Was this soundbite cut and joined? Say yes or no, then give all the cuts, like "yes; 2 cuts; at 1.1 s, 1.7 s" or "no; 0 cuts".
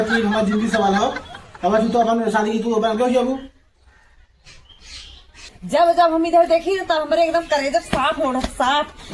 yes; 1 cut; at 5.5 s